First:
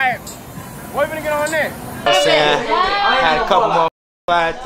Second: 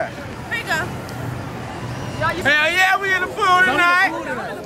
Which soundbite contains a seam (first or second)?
first